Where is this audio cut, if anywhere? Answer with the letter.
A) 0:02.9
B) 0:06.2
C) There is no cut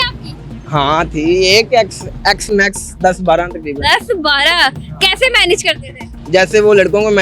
B